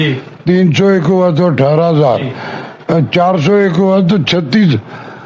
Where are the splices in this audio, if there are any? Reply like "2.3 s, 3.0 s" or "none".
none

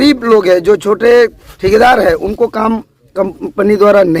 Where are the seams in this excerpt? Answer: 1.5 s

